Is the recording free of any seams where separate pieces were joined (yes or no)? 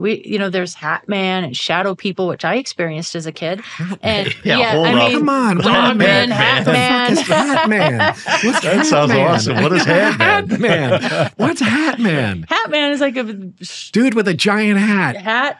yes